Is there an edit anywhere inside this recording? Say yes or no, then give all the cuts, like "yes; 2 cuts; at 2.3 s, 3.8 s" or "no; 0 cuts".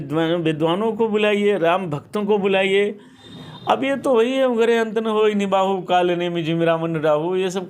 no; 0 cuts